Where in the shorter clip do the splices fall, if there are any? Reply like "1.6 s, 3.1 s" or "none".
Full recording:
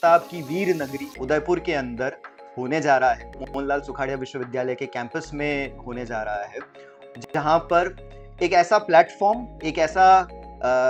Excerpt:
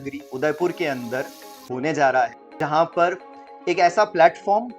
2.4 s